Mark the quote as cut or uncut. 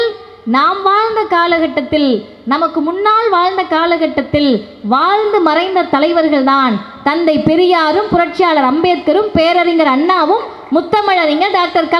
uncut